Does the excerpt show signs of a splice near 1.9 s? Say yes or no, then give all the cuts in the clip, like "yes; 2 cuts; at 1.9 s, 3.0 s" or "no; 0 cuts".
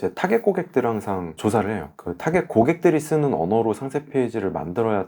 yes; 1 cut; at 1.9 s